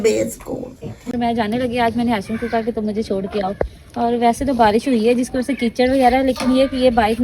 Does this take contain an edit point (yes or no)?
yes